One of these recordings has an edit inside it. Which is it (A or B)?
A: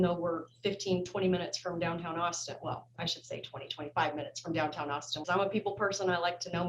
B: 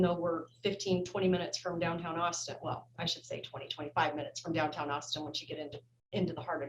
A